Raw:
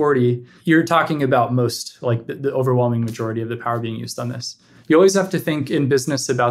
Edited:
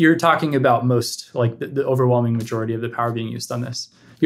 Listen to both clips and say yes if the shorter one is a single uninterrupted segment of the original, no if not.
yes